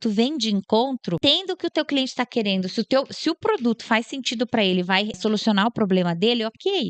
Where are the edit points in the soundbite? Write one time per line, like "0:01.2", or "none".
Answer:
0:01.2
0:05.2